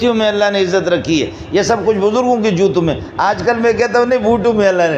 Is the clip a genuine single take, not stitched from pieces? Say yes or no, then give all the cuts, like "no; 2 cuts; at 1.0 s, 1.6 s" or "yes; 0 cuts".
yes; 0 cuts